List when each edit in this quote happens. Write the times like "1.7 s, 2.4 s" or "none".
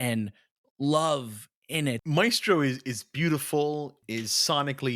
2.0 s, 4.0 s